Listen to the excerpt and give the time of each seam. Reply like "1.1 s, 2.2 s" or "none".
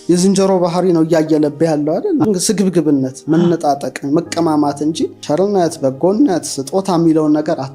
none